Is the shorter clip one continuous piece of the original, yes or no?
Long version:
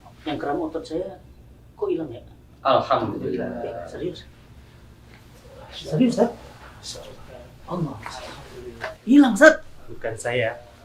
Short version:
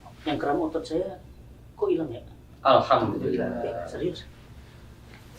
yes